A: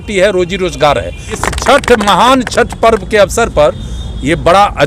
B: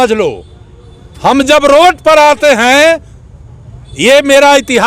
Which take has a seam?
A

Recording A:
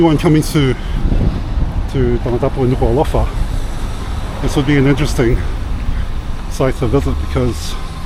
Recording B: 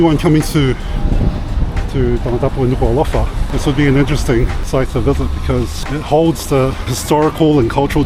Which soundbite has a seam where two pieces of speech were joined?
B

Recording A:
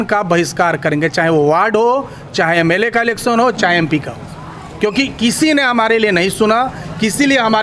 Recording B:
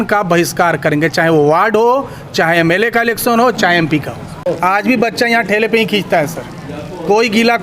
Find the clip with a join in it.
B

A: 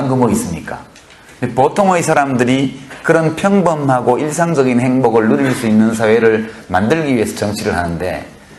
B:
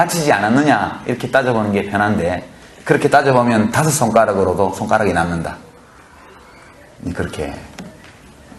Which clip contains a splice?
A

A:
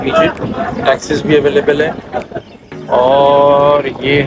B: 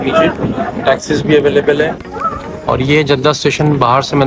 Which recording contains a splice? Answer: B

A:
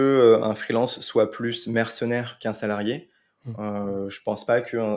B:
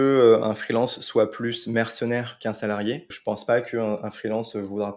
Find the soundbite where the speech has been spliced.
B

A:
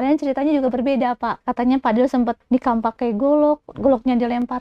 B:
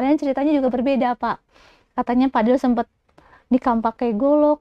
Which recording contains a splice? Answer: A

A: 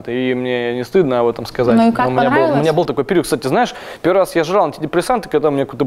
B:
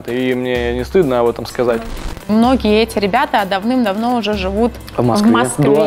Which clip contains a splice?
B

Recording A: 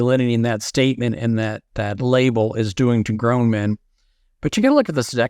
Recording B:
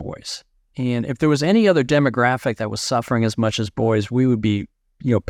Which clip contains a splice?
A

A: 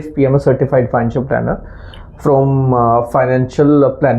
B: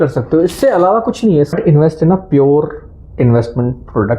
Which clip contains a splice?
B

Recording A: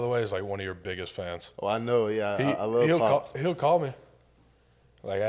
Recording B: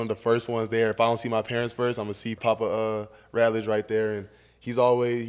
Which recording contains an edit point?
B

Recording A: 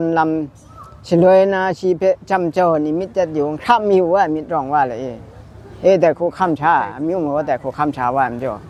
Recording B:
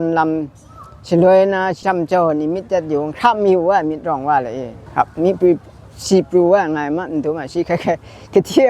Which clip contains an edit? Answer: B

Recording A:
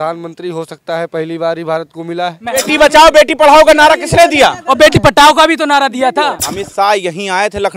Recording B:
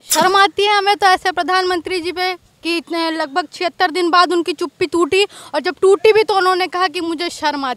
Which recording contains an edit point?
A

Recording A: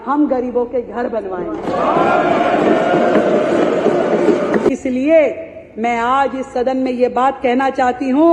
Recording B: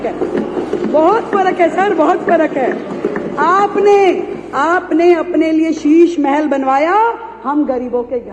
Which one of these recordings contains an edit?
A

